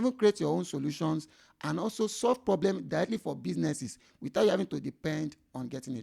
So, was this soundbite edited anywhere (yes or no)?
no